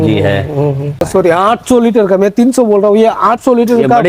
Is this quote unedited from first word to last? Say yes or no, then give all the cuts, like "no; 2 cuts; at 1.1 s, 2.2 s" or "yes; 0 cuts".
no; 1 cut; at 1.1 s